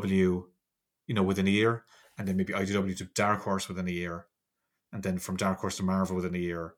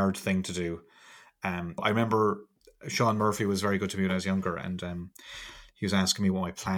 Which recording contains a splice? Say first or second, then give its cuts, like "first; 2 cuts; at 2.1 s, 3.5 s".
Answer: second; 1 cut; at 1.8 s